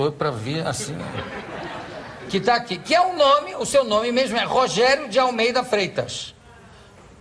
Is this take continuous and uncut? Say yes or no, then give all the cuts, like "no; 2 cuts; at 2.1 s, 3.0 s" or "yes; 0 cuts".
no; 1 cut; at 5.5 s